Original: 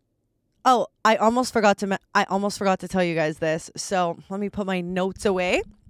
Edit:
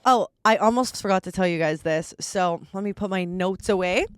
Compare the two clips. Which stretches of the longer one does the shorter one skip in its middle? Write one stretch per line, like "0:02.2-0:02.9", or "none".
0:01.5-0:02.5